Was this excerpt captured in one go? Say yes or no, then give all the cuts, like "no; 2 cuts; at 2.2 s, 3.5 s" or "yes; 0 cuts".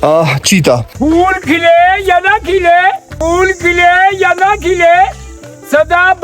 no; 2 cuts; at 0.9 s, 3.1 s